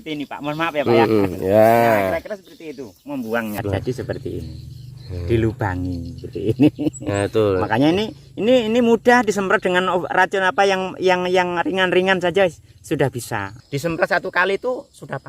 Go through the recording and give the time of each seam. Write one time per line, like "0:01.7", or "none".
0:03.6
0:13.5